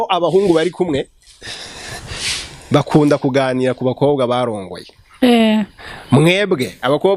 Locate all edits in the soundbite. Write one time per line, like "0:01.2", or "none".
none

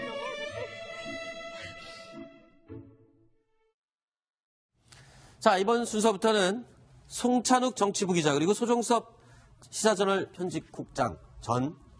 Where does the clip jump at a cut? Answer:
0:06.6

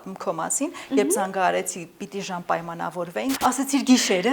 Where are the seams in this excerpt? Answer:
0:03.3

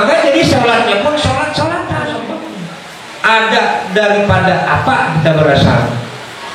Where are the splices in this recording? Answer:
0:02.3
0:03.4

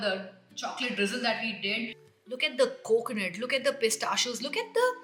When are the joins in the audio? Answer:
0:02.0

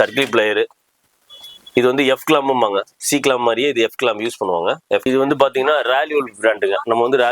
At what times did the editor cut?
0:05.1

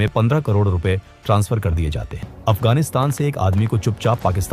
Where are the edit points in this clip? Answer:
0:02.3

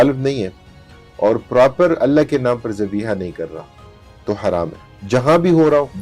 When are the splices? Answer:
none

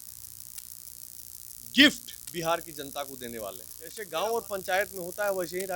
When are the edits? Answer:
0:04.0

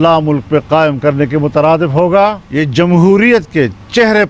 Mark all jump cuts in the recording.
0:02.4

